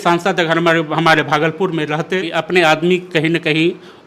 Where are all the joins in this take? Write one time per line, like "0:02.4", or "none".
0:02.3